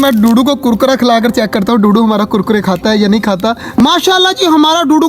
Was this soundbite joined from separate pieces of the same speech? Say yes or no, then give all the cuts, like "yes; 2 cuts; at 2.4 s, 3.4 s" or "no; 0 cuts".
yes; 1 cut; at 3.7 s